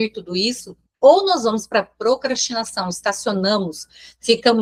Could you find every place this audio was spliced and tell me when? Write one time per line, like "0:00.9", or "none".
none